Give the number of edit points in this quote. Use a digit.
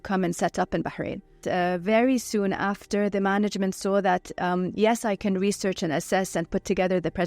0